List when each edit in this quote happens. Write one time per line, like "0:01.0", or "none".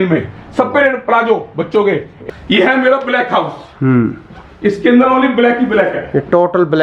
0:02.1